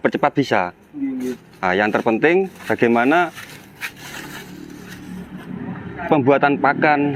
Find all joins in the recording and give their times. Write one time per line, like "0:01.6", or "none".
none